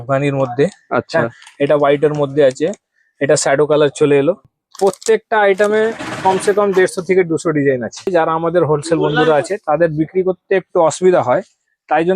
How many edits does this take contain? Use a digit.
2